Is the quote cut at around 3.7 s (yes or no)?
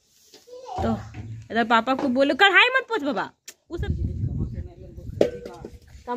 yes